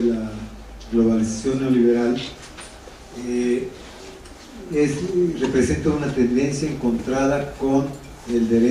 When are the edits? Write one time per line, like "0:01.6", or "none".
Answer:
0:07.2